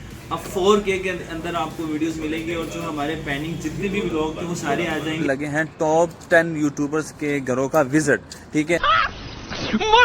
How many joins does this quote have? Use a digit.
1